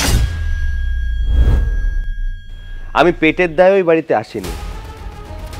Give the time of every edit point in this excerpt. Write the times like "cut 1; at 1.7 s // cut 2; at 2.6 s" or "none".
none